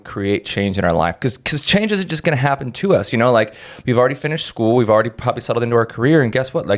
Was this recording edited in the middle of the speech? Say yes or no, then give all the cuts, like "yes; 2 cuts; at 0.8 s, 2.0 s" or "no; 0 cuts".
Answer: no; 0 cuts